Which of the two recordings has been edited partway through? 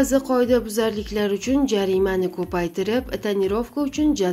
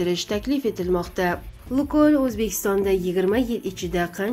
second; 1 cut; at 1.5 s

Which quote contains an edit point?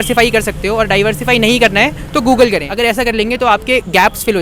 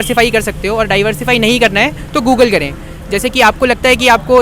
first; 1 cut; at 2.7 s

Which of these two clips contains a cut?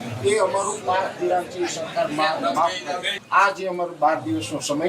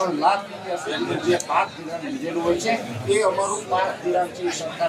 first; 1 cut; at 3.1 s

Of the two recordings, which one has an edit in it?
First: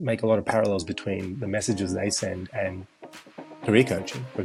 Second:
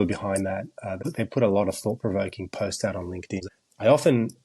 second; 2 cuts; at 1.0 s, 3.4 s

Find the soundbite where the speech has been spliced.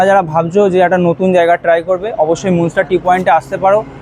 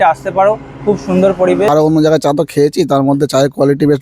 second; 1 cut; at 1.7 s

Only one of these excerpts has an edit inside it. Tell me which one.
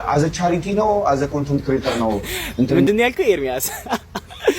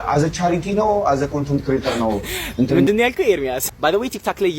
second; 1 cut; at 3.7 s

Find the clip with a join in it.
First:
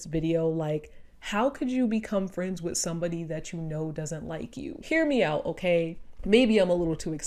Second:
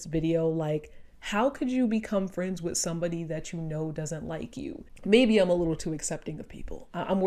second; 1 cut; at 4.8 s

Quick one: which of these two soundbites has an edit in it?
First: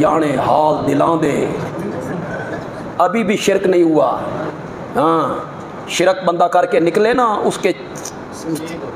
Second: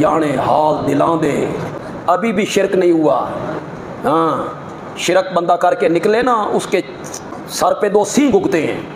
second; 2 cuts; at 1.8 s, 7.4 s

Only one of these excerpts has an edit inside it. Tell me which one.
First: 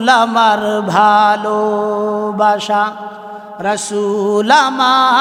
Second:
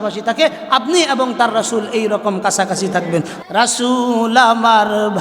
second; 1 cut; at 3.4 s

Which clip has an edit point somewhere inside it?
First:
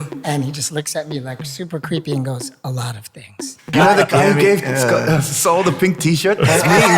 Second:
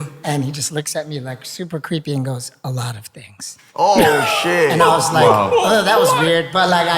first; 1 cut; at 3.7 s

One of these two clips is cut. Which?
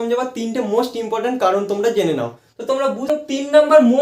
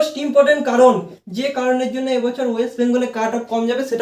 first; 1 cut; at 3.1 s

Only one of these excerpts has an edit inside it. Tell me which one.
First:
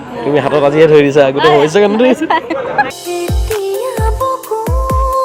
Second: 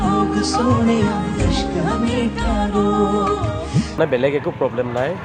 second; 1 cut; at 4.0 s

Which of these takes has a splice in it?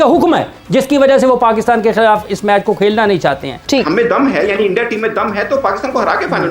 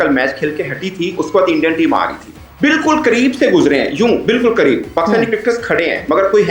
first; 1 cut; at 3.5 s

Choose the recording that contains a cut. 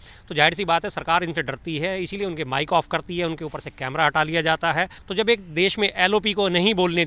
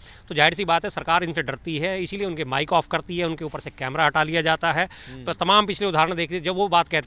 first; 1 cut; at 5.0 s

